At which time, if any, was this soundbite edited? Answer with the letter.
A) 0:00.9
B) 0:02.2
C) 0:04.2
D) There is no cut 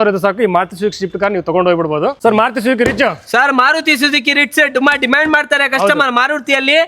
B